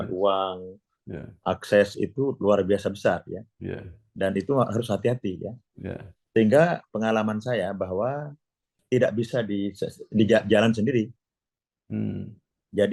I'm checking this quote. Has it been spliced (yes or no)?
yes